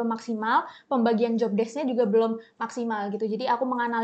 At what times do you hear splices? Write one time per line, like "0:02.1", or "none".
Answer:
none

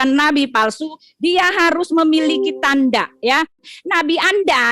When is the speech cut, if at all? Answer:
0:03.7

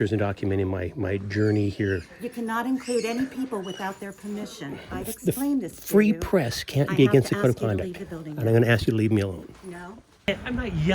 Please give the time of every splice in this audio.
0:04.8
0:10.3

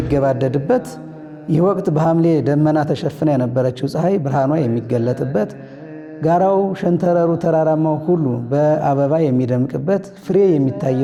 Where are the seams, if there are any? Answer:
none

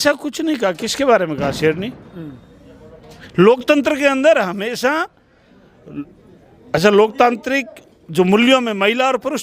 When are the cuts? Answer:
none

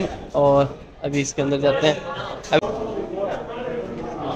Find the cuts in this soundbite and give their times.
0:02.6

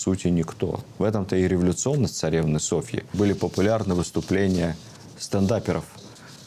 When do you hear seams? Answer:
0:03.0

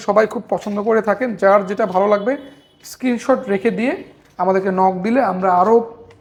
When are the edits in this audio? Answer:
none

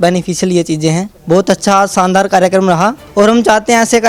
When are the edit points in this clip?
0:01.1
0:03.0

